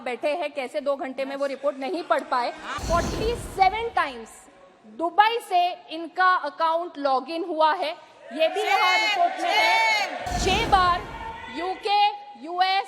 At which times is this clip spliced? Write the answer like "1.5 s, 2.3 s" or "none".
2.8 s, 10.2 s